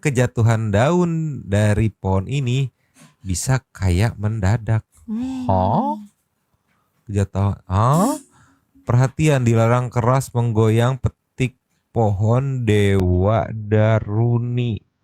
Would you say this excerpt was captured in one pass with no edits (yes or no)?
yes